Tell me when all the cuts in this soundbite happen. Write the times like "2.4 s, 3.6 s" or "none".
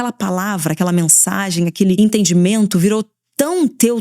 2.0 s